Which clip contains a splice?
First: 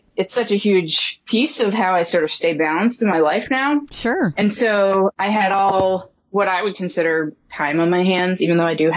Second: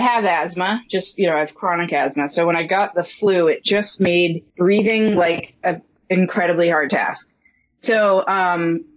second; 1 cut; at 4.4 s

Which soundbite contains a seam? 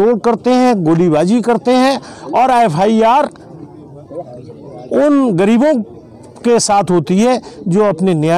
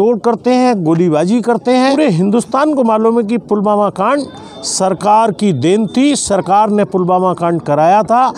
second; 1 cut; at 1.9 s

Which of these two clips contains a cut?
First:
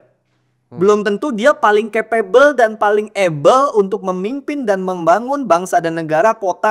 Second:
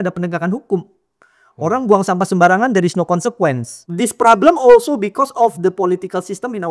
second; 1 cut; at 3.7 s

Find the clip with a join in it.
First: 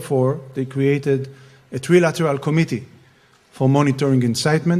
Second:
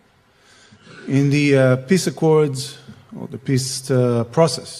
first; 1 cut; at 2.5 s

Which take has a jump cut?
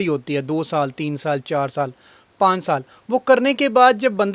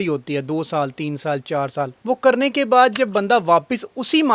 second; 1 cut; at 2.0 s

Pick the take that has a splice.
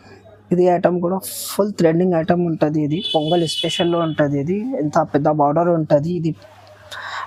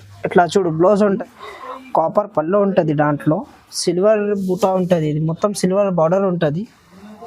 second; 1 cut; at 1.0 s

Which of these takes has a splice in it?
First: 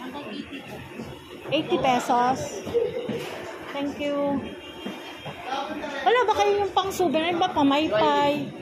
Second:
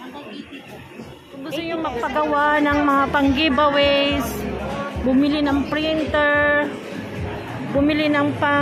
second; 1 cut; at 1.6 s

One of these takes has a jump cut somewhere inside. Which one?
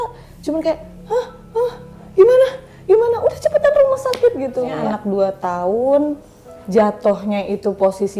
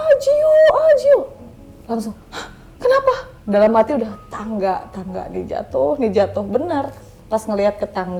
first; 1 cut; at 4.7 s

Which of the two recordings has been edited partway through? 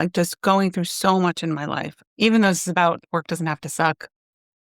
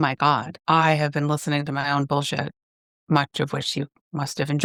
first; 2 cuts; at 1.9 s, 3.0 s

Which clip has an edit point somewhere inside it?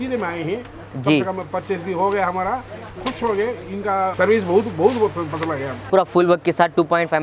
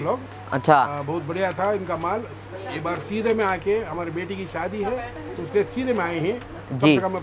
first; 2 cuts; at 4.1 s, 5.8 s

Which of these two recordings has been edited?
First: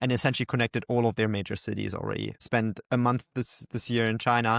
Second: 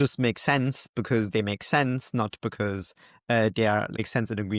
first; 1 cut; at 2.4 s

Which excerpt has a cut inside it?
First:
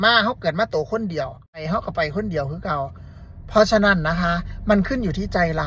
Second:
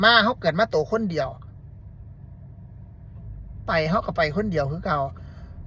first; 1 cut; at 1.6 s

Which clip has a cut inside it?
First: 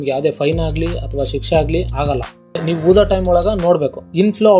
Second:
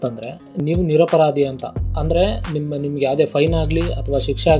first; 1 cut; at 2.6 s

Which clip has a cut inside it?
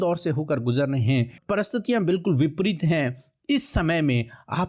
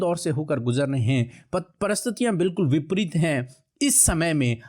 first; 1 cut; at 1.4 s

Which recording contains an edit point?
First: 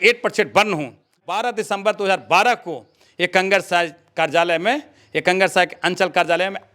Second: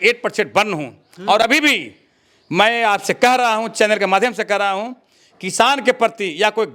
first; 1 cut; at 1.2 s

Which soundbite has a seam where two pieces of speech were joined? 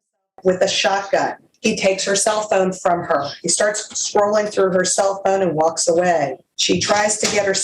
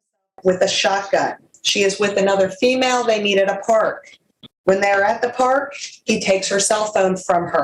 first; 2 cuts; at 1.4 s, 6.5 s

